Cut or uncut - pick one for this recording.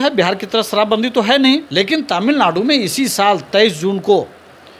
cut